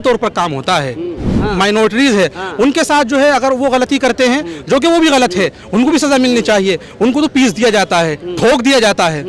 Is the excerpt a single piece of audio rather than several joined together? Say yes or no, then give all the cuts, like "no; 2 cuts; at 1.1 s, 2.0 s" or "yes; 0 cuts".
no; 2 cuts; at 1.3 s, 7.3 s